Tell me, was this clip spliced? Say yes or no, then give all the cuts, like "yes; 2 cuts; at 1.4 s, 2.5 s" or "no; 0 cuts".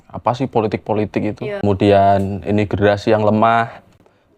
yes; 1 cut; at 1.6 s